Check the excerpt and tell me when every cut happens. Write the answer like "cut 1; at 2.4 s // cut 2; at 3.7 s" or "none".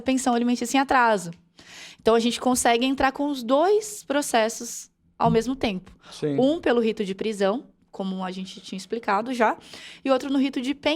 none